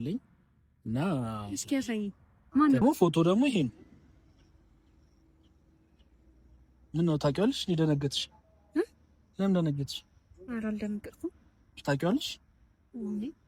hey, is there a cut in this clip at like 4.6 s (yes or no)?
no